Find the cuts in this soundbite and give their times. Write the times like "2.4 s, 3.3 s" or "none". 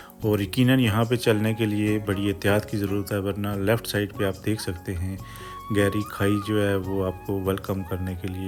none